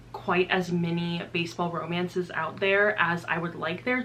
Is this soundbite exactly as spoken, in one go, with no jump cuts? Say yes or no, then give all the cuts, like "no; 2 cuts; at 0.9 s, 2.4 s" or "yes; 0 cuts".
yes; 0 cuts